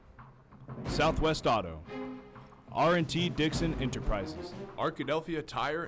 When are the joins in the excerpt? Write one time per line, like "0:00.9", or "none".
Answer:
0:04.3